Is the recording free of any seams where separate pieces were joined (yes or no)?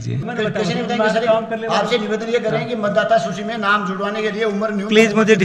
yes